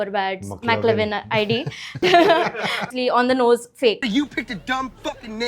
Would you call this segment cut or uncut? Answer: uncut